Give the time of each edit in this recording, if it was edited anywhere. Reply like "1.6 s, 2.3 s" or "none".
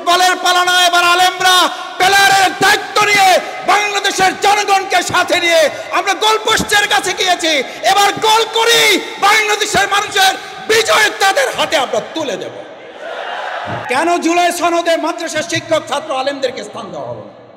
13.8 s